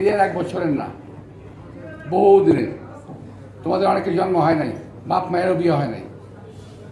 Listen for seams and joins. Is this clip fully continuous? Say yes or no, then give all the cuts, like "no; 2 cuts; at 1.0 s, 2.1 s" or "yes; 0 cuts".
yes; 0 cuts